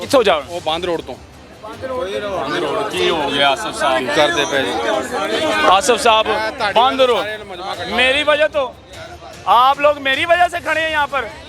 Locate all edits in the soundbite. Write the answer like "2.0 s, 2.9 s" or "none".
none

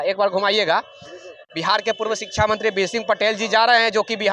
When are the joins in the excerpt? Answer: none

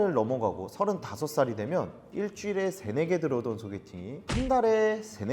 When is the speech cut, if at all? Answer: 4.2 s

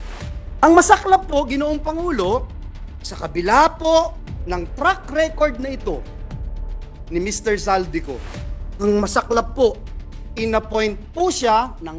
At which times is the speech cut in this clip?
none

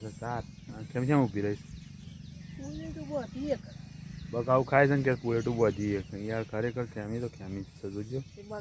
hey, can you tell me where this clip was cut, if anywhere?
none

